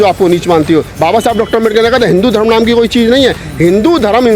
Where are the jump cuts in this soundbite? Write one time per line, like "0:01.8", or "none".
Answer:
0:00.9